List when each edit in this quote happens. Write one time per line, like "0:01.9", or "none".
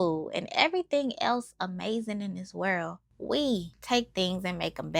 none